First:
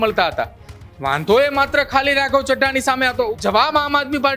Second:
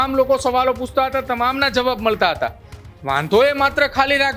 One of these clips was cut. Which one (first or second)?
first